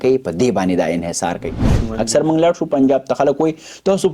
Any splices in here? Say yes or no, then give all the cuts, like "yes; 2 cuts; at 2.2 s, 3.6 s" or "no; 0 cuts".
yes; 1 cut; at 1.8 s